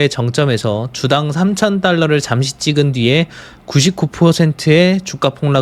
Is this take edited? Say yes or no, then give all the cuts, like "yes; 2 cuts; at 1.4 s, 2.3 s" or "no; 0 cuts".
no; 0 cuts